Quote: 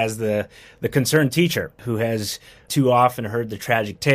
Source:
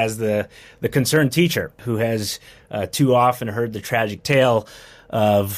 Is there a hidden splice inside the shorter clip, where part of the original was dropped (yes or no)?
yes